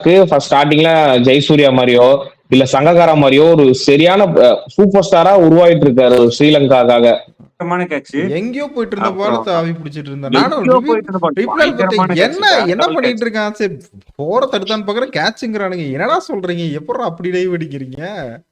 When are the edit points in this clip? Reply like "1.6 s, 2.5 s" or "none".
7.6 s

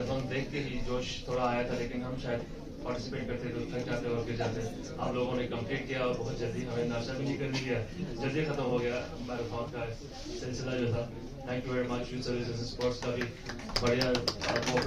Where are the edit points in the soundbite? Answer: none

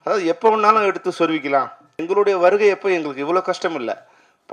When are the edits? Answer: 2.0 s

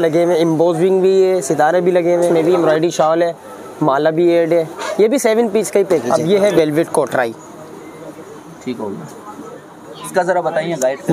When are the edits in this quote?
2.3 s, 6.0 s

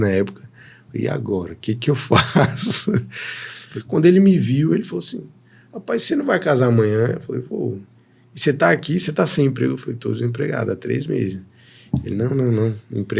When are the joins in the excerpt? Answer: 3.5 s

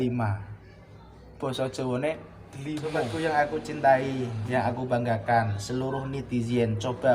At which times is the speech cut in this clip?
2.9 s

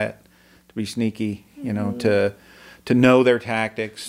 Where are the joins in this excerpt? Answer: none

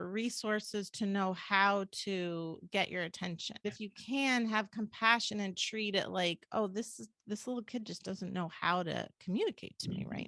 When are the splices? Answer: 3.6 s

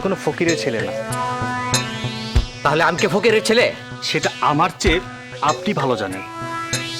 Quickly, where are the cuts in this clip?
none

